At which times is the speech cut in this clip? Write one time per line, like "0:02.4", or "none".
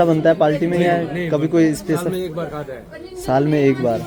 none